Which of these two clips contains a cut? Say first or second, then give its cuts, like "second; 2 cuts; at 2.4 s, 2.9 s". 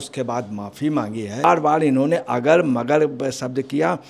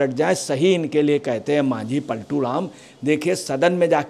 first; 1 cut; at 1.4 s